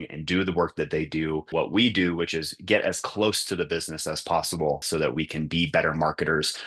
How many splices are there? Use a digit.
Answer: 2